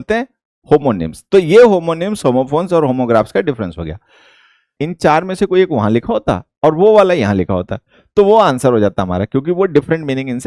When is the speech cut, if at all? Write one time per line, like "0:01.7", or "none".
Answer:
0:04.8